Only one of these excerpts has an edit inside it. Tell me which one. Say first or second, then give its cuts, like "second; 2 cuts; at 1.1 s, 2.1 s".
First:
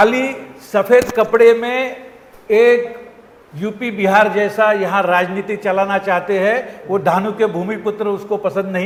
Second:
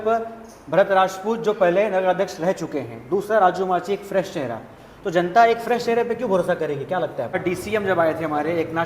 second; 1 cut; at 7.4 s